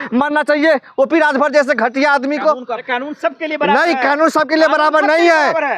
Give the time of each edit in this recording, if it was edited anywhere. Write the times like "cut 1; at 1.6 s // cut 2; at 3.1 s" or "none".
cut 1; at 2.8 s